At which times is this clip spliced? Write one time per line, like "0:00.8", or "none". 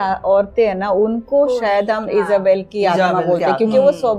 none